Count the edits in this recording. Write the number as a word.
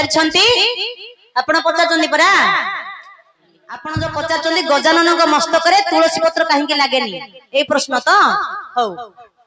one